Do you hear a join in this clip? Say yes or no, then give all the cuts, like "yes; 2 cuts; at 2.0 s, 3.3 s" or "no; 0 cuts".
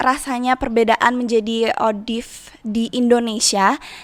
no; 0 cuts